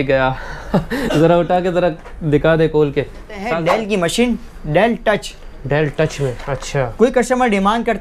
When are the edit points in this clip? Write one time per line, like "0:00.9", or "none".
0:03.4